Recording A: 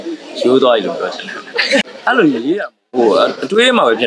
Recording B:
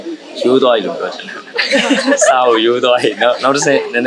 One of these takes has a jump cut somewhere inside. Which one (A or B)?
A